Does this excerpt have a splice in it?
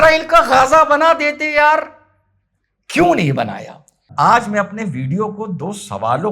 yes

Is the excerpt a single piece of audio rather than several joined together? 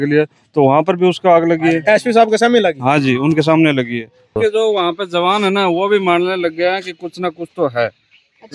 no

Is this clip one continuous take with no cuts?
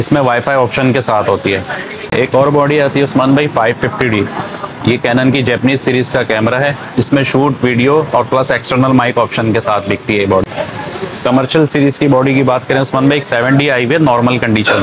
no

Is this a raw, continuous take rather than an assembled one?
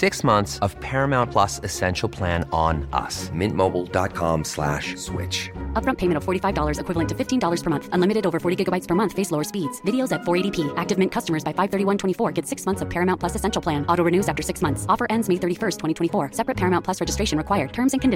yes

